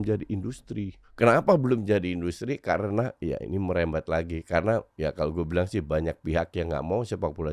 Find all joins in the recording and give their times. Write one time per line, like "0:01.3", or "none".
0:01.0
0:04.9